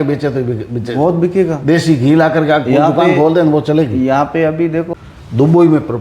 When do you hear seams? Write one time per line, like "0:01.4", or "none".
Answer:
0:04.9